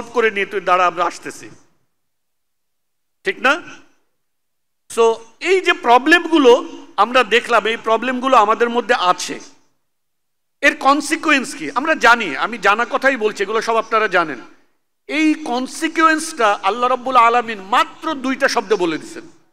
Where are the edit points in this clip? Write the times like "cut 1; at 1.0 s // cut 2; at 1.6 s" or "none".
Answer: none